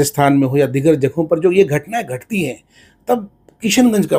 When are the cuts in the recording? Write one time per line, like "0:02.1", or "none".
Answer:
none